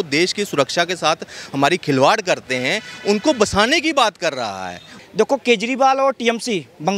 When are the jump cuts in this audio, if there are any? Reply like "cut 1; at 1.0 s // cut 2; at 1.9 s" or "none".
cut 1; at 4.8 s